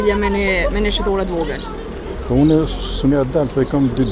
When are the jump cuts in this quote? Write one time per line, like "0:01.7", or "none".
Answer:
none